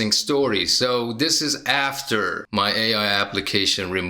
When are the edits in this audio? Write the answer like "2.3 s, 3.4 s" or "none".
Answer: 2.4 s